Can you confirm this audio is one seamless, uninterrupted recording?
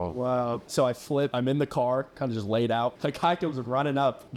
no; 2 cuts; at 1.0 s, 3.0 s

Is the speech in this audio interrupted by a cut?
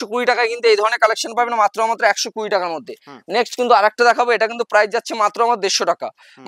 no; 0 cuts

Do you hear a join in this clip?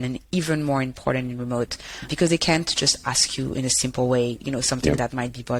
no; 0 cuts

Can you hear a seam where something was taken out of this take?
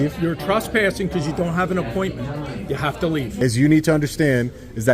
yes; 1 cut; at 3.3 s

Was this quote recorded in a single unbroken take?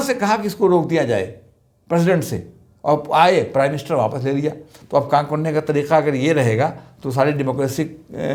yes; 0 cuts

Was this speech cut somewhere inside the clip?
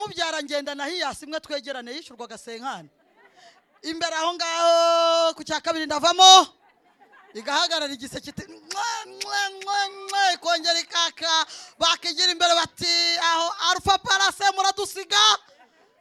no; 0 cuts

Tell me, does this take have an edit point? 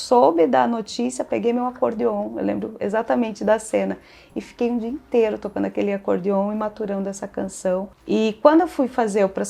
no; 0 cuts

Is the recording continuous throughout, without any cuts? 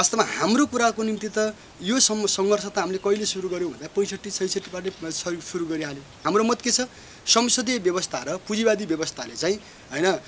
no; 1 cut; at 6.1 s

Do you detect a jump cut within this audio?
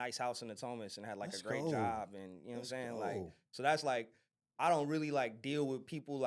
no; 0 cuts

